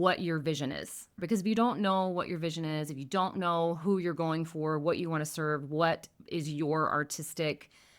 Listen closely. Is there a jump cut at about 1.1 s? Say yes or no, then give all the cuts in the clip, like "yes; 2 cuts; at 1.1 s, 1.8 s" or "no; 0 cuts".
yes; 1 cut; at 1.1 s